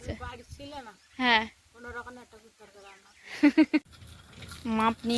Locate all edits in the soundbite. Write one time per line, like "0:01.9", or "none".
0:03.8